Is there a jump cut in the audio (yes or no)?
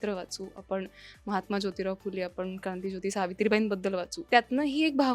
yes